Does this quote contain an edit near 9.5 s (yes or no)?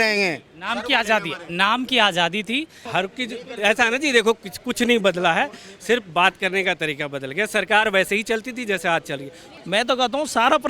yes